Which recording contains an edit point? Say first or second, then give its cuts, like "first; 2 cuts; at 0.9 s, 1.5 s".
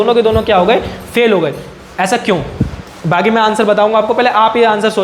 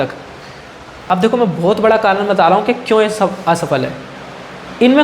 second; 1 cut; at 1.0 s